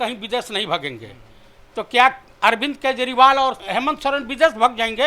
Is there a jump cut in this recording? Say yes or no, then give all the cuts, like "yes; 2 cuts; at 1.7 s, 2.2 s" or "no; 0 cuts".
yes; 1 cut; at 3.6 s